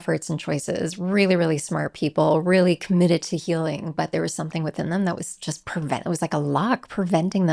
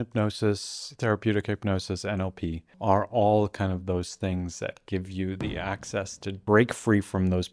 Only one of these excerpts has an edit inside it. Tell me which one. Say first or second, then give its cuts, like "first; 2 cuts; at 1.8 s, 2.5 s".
second; 2 cuts; at 2.7 s, 6.4 s